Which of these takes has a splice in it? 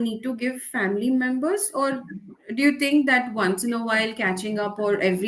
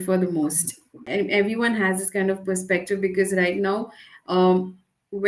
second; 1 cut; at 0.9 s

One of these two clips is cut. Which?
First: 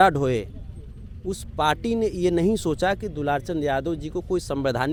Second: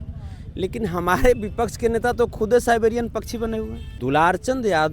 second; 1 cut; at 3.8 s

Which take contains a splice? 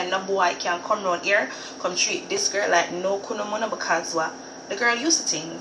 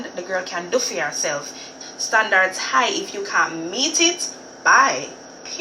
second; 1 cut; at 1.7 s

